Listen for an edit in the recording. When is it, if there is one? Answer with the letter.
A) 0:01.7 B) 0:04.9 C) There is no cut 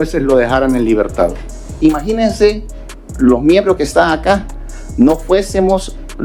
A